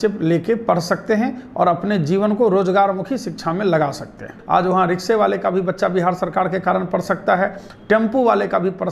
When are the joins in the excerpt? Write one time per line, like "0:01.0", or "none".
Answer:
0:04.3